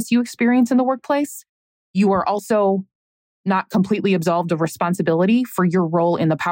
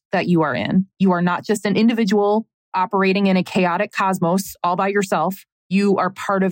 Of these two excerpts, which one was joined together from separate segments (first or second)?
second